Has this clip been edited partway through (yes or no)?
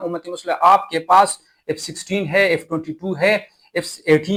no